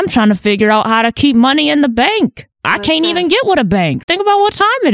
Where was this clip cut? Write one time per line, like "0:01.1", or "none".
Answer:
none